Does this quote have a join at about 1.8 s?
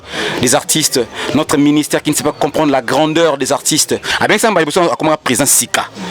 no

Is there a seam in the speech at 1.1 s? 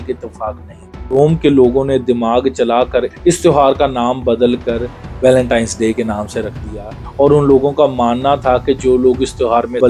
yes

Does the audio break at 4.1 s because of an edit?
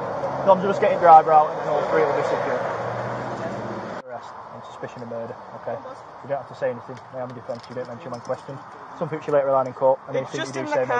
yes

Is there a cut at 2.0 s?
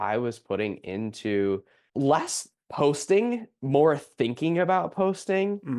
no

